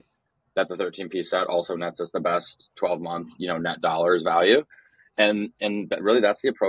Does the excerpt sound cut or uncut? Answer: uncut